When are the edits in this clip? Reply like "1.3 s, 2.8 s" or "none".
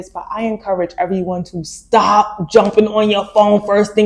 none